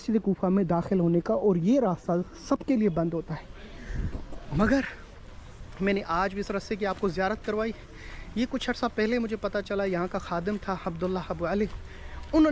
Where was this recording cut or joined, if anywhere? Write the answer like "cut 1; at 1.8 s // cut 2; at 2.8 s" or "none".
none